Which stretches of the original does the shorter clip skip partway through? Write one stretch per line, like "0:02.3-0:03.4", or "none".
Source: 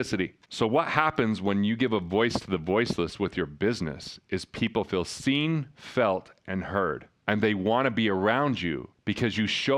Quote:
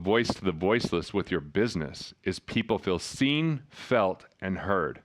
none